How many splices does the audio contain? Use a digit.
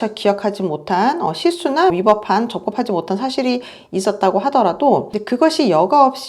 1